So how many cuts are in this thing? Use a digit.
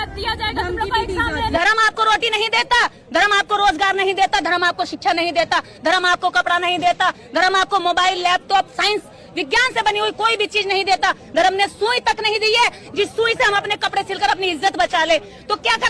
1